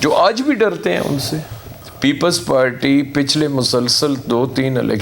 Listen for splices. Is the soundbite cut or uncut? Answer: cut